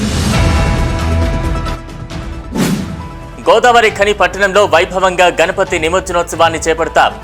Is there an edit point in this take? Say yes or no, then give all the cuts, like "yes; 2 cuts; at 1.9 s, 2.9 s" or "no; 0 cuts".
yes; 1 cut; at 3.2 s